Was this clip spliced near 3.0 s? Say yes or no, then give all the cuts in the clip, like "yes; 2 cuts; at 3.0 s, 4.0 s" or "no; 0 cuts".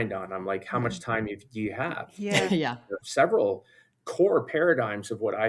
yes; 1 cut; at 3.0 s